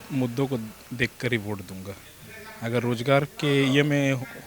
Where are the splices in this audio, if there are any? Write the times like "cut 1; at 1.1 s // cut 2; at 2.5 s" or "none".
none